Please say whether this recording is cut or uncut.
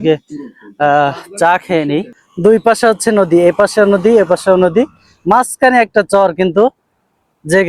cut